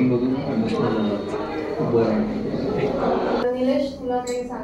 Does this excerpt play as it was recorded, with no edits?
no; 1 cut; at 3.4 s

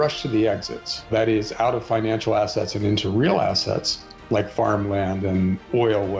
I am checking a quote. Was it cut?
yes; 1 cut; at 1.1 s

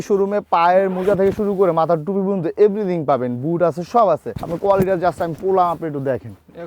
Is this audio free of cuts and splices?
yes; 0 cuts

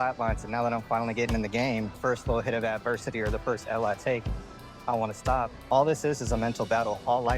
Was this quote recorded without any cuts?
no; 2 cuts; at 2.0 s, 5.6 s

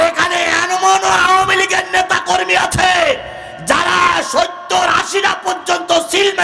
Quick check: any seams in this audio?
no; 0 cuts

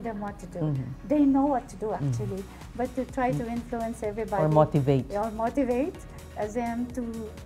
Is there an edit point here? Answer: no; 0 cuts

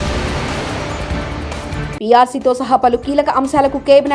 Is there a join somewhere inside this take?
no; 0 cuts

